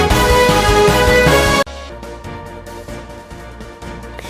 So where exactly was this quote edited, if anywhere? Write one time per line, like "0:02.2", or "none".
0:01.7